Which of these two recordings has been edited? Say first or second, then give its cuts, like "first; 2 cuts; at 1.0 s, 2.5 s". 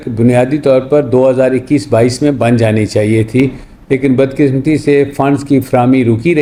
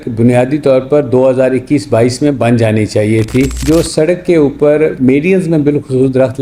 second; 1 cut; at 3.6 s